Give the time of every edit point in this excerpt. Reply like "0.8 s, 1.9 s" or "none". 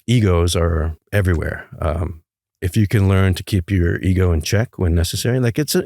1.0 s, 2.5 s